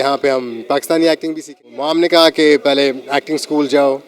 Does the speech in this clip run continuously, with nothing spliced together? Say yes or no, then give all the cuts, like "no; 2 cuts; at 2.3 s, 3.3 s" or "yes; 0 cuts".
no; 1 cut; at 1.7 s